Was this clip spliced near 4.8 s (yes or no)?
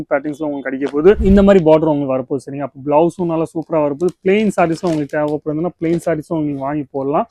no